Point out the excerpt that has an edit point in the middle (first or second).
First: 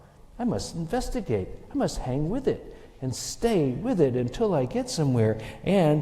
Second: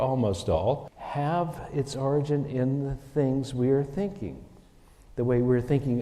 second